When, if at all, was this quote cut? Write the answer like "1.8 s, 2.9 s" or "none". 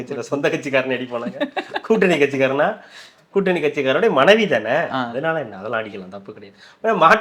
none